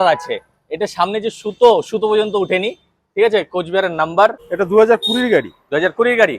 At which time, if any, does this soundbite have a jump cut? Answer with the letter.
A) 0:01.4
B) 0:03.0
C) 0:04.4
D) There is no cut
C